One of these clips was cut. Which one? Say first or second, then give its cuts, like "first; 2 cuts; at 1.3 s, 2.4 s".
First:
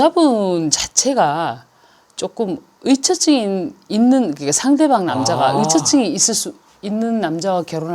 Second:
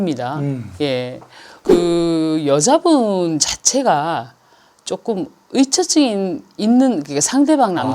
second; 1 cut; at 1.6 s